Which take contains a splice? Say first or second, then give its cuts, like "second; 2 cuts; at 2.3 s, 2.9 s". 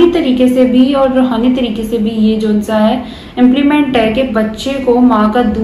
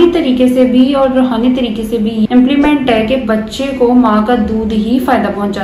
second; 1 cut; at 2.3 s